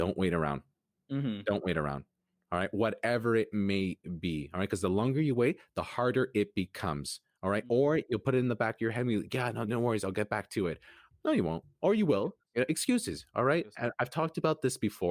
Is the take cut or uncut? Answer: cut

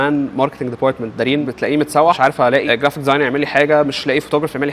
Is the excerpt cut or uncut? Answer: cut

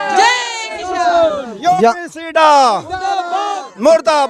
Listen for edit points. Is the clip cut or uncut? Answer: uncut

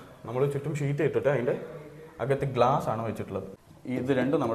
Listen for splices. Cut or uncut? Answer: cut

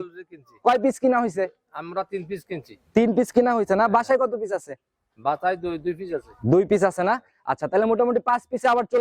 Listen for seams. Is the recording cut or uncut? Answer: uncut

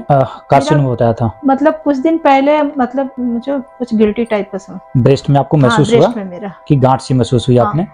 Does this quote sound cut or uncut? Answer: uncut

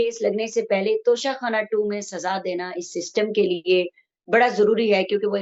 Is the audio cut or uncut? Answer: uncut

